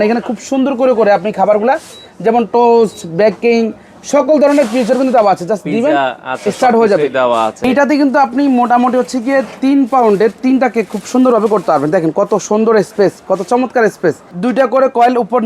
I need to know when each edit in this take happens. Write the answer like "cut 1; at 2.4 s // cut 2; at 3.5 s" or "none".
cut 1; at 7.7 s // cut 2; at 14.3 s